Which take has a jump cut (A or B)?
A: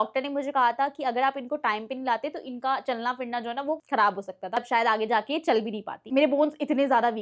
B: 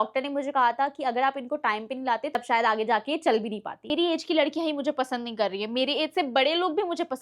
B